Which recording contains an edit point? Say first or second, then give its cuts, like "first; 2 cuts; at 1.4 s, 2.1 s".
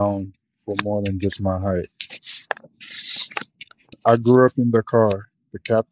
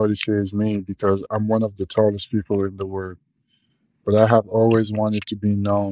first; 1 cut; at 3.9 s